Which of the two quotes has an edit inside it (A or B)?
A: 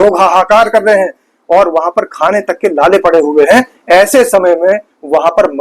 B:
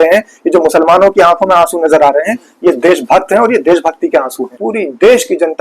B